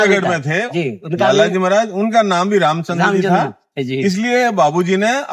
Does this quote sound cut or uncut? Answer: uncut